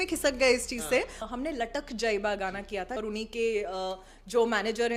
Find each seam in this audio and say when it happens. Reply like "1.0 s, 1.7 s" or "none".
1.2 s, 3.0 s